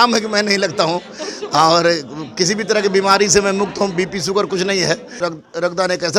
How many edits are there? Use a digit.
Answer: 1